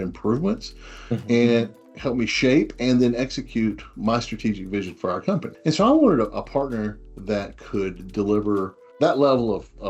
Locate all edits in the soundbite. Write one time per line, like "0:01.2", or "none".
0:05.5
0:08.8